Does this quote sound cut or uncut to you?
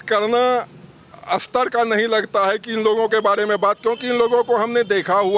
uncut